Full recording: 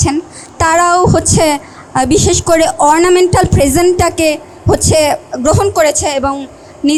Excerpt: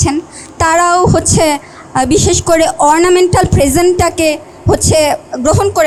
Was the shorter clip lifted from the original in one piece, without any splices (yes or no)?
yes